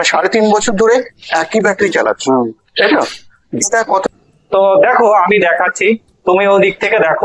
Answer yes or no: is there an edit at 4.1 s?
yes